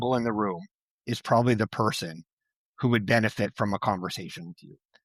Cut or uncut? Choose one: uncut